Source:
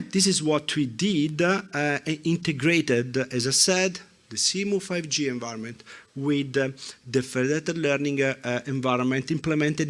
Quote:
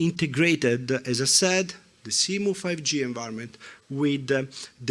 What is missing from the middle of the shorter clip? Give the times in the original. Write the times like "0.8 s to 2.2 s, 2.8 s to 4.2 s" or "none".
none